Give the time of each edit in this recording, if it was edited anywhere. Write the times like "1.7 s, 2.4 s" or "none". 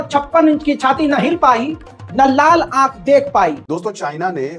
3.6 s